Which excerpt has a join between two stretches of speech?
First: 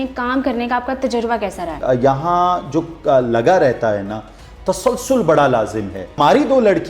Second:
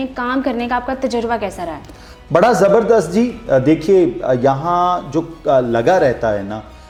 first; 2 cuts; at 1.8 s, 6.2 s

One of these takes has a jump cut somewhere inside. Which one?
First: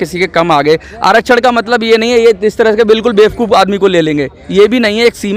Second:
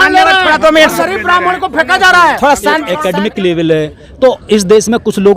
second; 1 cut; at 2.9 s

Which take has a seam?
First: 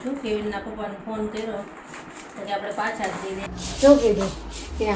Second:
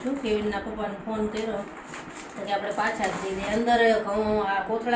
first; 1 cut; at 3.4 s

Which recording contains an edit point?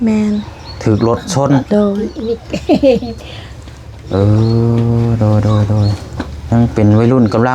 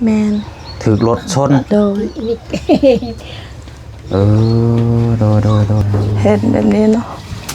second; 1 cut; at 5.8 s

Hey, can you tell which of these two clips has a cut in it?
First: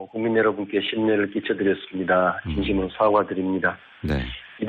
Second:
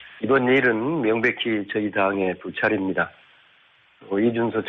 first; 1 cut; at 1.7 s

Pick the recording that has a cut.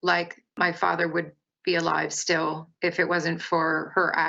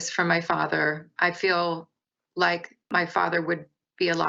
second; 1 cut; at 1.0 s

